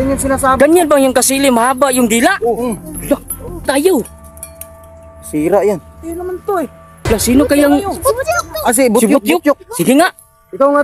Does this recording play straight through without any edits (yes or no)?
no